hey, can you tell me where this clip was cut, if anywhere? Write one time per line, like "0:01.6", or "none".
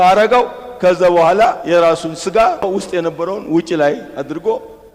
0:02.7